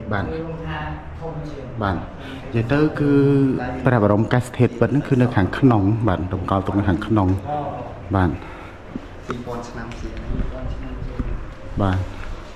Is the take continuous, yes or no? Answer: yes